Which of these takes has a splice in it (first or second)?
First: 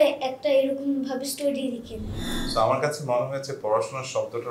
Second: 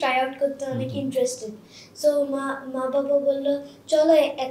first